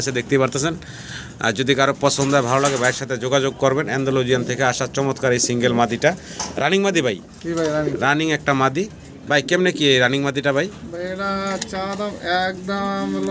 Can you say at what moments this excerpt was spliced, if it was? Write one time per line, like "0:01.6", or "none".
none